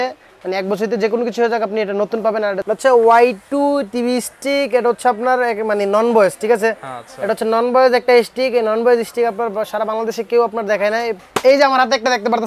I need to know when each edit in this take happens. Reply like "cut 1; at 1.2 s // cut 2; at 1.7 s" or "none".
cut 1; at 2.6 s // cut 2; at 11.2 s